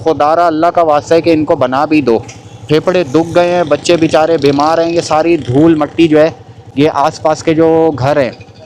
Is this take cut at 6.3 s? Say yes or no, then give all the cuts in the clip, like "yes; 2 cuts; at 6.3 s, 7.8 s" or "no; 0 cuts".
no; 0 cuts